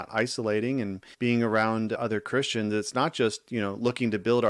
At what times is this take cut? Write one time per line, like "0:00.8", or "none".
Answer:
0:01.0